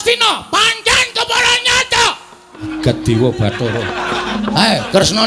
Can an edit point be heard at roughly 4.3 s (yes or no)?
yes